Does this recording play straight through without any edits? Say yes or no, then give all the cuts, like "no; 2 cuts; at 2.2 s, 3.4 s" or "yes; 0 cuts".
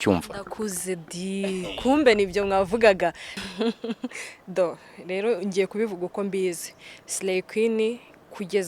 no; 1 cut; at 3.3 s